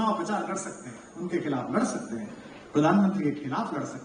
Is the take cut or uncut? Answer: uncut